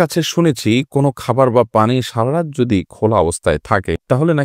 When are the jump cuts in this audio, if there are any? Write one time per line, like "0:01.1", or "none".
none

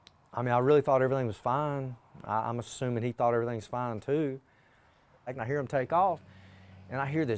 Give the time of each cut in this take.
0:05.4

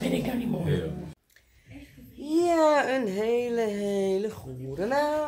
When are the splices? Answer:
0:01.1

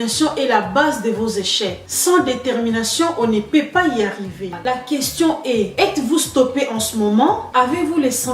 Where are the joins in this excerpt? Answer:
0:04.5

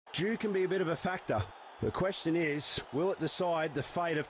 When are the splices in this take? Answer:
none

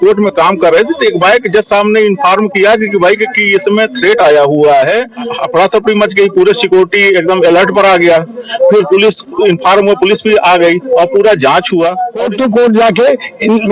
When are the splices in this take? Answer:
0:05.3
0:12.2

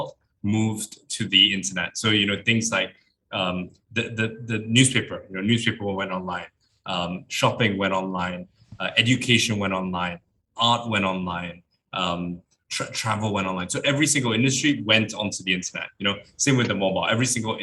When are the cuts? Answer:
none

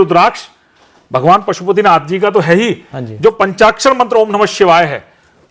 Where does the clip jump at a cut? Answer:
none

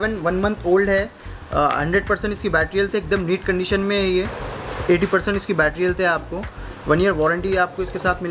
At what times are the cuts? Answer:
0:04.4

